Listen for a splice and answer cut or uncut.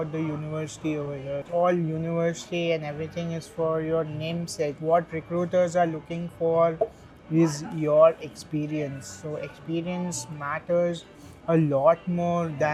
uncut